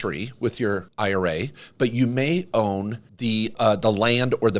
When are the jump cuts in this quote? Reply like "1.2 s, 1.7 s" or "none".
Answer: 0.9 s, 3.4 s